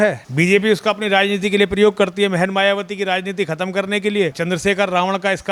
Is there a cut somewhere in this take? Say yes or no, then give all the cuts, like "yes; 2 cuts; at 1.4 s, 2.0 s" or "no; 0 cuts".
no; 0 cuts